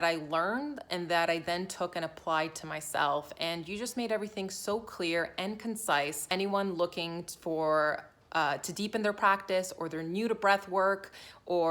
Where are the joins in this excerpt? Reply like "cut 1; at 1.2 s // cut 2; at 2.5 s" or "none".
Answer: cut 1; at 6.3 s